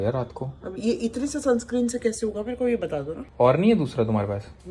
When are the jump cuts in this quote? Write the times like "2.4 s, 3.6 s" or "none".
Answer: none